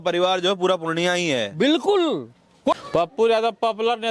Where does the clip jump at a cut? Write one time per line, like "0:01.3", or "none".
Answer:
0:02.7